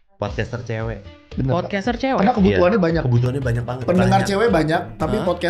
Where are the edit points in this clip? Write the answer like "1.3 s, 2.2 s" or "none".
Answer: none